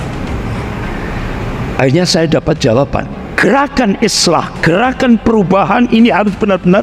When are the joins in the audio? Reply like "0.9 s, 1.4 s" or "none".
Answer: 3.2 s